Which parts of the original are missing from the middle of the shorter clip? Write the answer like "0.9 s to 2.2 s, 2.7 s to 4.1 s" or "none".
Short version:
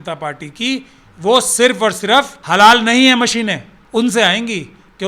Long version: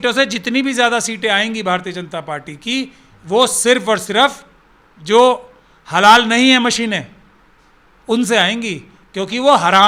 4.4 s to 5.8 s, 7.2 s to 7.9 s